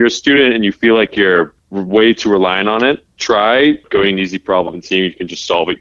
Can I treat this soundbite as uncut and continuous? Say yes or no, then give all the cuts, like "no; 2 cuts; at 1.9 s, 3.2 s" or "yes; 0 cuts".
no; 1 cut; at 3.9 s